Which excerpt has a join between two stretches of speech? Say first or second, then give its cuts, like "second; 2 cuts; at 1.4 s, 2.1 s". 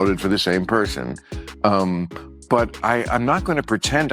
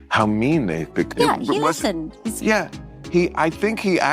second; 1 cut; at 1.1 s